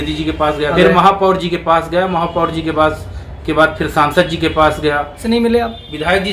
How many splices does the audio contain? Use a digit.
2